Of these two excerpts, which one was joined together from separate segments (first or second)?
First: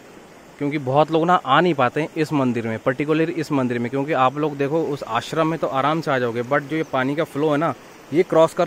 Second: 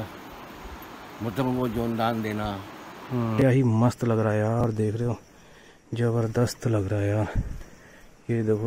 second